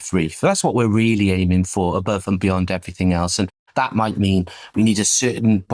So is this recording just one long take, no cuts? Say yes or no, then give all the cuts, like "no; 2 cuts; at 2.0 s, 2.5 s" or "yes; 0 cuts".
yes; 0 cuts